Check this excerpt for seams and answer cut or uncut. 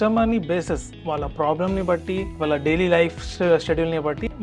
cut